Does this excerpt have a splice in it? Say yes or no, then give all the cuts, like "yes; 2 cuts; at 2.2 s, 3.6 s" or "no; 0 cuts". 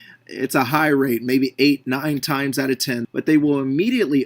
yes; 1 cut; at 3.0 s